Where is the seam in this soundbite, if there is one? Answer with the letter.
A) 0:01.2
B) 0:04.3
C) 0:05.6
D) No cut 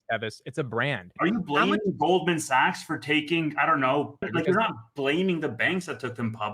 B